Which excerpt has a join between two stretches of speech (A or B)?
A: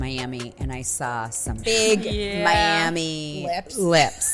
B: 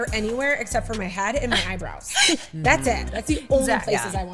A